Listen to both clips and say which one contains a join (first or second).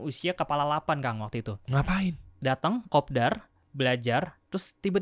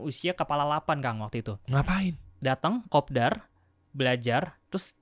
first